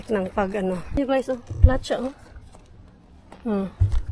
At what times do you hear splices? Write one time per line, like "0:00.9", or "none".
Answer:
0:01.0